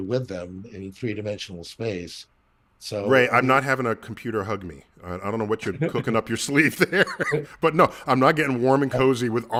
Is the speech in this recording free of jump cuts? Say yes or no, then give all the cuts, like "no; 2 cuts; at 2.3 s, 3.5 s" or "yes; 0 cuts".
yes; 0 cuts